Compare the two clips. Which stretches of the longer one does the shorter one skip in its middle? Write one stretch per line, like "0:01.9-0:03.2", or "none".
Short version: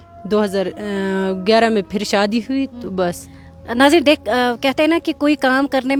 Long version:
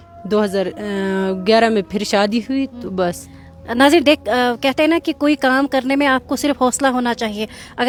none